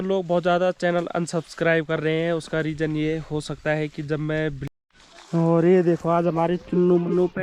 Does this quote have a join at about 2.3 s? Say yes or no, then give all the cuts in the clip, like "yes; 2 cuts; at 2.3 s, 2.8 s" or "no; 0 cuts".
no; 1 cut; at 4.6 s